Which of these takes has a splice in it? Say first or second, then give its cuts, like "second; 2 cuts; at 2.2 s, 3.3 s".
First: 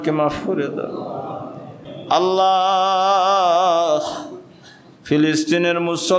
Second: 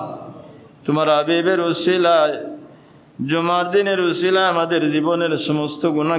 first; 1 cut; at 1.8 s